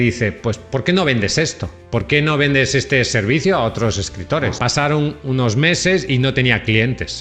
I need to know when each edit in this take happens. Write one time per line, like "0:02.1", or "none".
0:04.6